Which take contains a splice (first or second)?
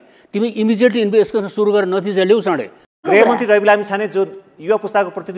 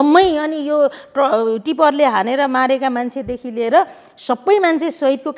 first